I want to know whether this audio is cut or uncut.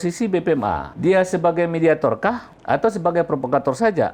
cut